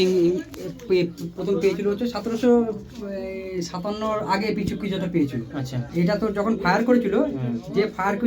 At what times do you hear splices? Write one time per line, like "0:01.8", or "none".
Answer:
0:05.8